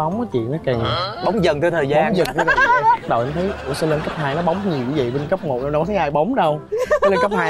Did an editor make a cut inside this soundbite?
no; 0 cuts

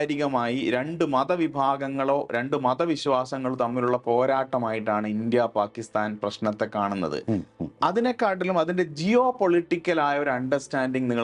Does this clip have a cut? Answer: no; 0 cuts

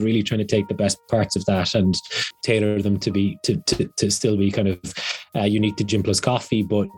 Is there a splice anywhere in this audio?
yes; 1 cut; at 2.3 s

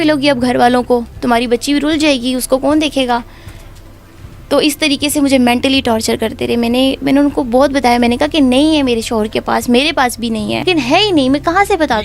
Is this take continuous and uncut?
yes; 0 cuts

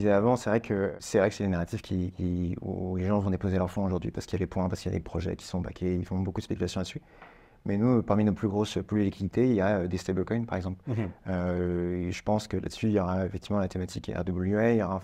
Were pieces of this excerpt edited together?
yes; 1 cut; at 0.9 s

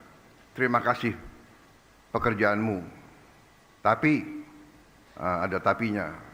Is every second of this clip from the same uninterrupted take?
yes; 0 cuts

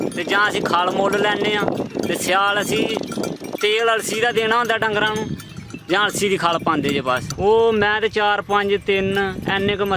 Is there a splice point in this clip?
yes; 1 cut; at 7.3 s

